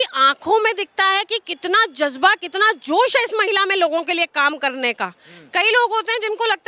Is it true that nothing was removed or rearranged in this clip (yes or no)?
yes